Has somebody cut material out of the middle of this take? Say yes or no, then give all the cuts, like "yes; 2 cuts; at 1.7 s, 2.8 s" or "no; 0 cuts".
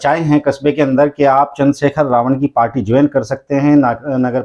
no; 0 cuts